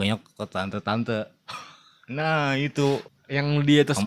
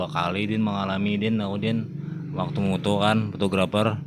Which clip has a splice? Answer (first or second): first